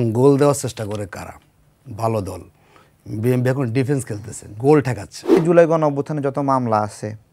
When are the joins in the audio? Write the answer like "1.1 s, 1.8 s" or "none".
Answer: 5.4 s

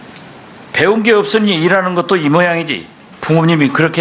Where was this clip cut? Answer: 1.1 s

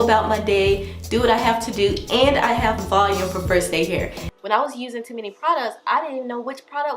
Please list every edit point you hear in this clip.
4.2 s

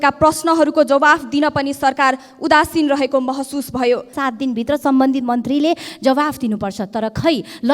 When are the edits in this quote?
4.1 s

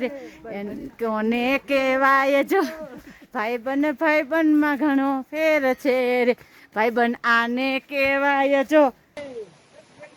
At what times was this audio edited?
9.0 s

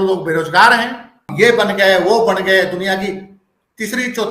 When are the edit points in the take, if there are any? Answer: 1.3 s

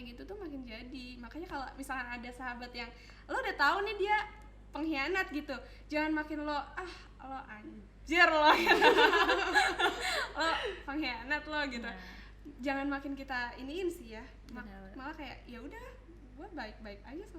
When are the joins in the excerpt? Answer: none

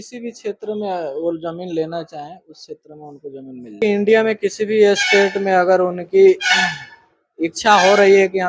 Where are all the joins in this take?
3.7 s

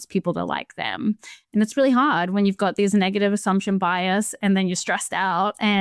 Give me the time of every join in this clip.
none

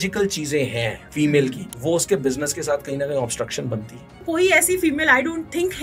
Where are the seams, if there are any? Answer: 1.0 s, 1.7 s, 4.2 s

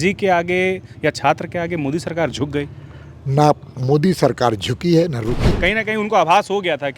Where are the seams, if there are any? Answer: 5.4 s

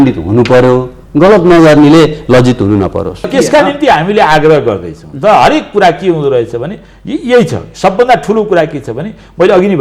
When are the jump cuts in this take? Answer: 3.3 s

